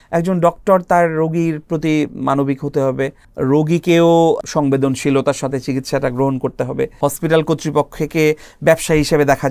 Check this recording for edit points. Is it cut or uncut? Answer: cut